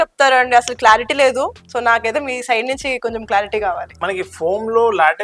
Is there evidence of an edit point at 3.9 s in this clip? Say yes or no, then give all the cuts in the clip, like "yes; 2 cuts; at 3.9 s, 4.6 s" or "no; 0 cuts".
yes; 1 cut; at 3.9 s